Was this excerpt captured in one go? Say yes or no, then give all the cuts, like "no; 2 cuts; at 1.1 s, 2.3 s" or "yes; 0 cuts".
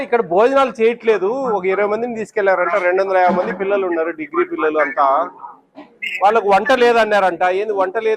yes; 0 cuts